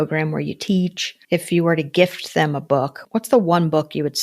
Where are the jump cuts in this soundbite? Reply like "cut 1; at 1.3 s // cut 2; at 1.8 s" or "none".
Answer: cut 1; at 1.1 s // cut 2; at 3.0 s